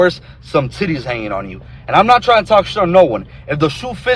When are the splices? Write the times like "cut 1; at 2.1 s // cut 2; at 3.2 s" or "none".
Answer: none